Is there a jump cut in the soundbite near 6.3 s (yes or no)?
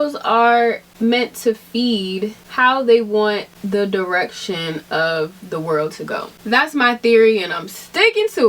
yes